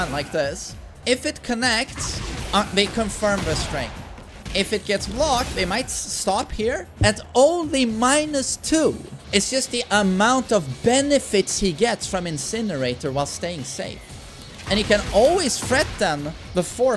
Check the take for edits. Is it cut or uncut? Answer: cut